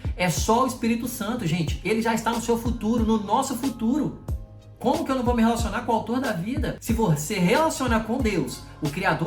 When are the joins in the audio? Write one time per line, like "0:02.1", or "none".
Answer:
0:06.7